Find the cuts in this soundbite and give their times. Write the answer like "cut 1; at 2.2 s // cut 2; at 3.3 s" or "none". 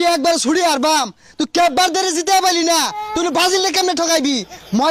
none